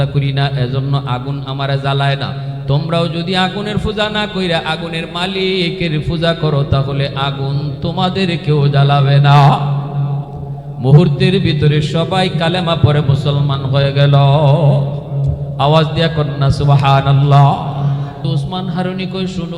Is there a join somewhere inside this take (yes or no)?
yes